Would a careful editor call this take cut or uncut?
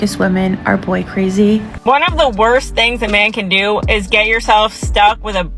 cut